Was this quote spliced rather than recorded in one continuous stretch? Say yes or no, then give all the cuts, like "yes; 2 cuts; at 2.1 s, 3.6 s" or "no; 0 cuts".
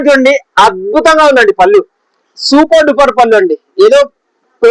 no; 0 cuts